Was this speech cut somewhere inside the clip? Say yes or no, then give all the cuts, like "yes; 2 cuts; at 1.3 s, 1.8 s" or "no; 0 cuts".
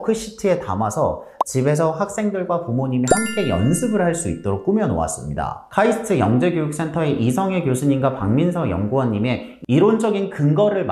yes; 1 cut; at 5.6 s